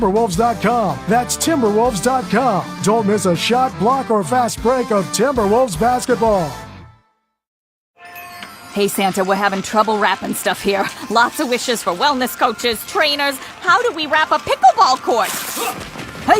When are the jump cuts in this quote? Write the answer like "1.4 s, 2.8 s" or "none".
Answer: 7.8 s